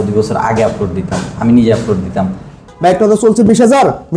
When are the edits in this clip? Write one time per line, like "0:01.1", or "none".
0:02.7